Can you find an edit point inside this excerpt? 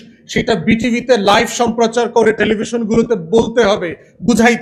no; 0 cuts

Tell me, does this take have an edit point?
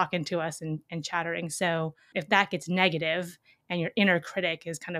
yes; 1 cut; at 2.1 s

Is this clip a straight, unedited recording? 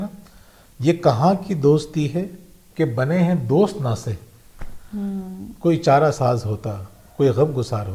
yes; 0 cuts

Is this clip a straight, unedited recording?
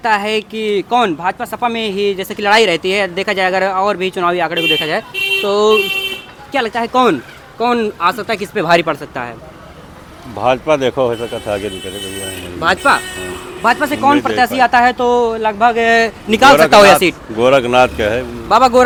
yes; 0 cuts

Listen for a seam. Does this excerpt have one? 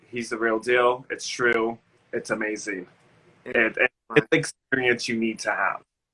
no; 0 cuts

